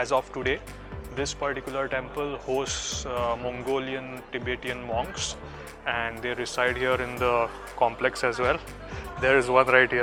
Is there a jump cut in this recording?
no; 0 cuts

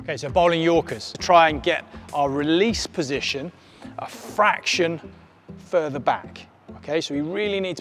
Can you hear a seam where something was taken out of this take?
yes; 1 cut; at 1.1 s

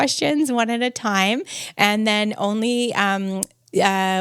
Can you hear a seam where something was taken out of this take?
no; 0 cuts

